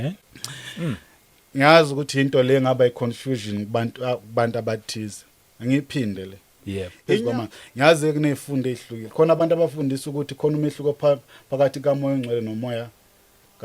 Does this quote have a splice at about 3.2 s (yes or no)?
no